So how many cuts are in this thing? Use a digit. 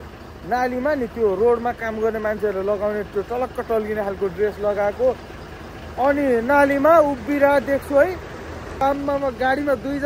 1